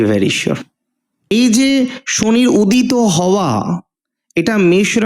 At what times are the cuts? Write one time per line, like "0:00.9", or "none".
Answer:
0:01.3